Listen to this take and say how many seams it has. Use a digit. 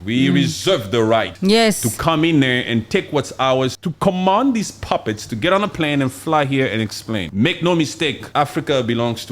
4